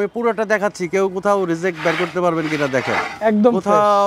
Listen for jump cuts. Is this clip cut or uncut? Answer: uncut